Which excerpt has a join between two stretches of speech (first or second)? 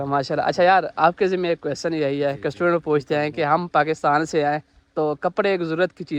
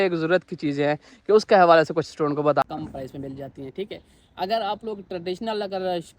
second